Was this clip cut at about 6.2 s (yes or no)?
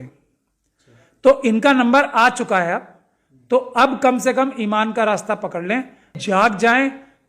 yes